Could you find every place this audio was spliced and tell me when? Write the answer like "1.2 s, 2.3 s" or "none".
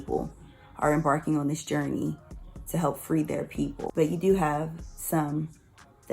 3.8 s